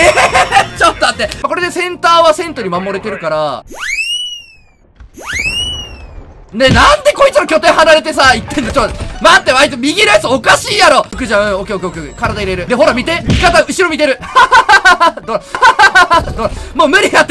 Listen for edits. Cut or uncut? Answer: cut